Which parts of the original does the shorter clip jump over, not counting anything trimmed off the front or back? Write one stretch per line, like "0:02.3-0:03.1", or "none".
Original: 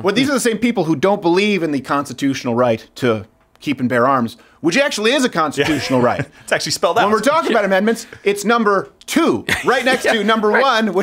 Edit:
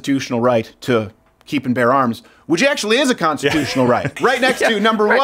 0:06.3-0:09.5